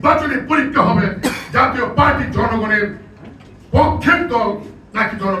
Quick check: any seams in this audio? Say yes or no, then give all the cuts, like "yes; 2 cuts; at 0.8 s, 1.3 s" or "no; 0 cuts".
no; 0 cuts